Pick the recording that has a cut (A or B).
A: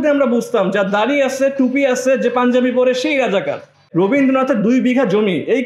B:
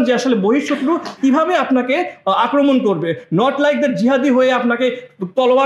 A